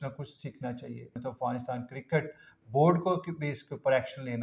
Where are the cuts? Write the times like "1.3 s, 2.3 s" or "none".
1.2 s